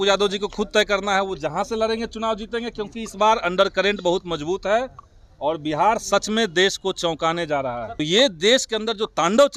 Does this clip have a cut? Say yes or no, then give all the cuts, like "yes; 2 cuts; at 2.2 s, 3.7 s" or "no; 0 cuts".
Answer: yes; 1 cut; at 8.0 s